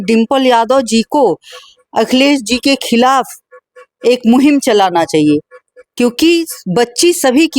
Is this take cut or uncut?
uncut